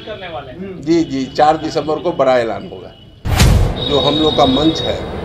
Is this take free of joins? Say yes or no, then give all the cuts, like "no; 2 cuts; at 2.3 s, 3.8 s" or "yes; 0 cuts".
no; 1 cut; at 3.4 s